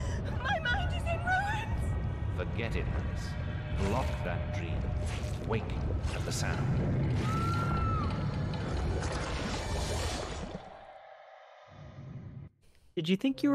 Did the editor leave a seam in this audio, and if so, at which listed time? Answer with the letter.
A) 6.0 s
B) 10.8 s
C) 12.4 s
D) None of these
C